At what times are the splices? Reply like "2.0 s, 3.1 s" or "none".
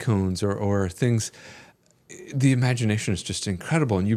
none